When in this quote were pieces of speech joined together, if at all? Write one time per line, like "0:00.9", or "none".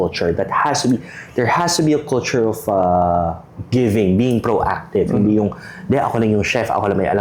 none